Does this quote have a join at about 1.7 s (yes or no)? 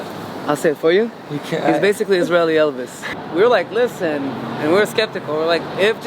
no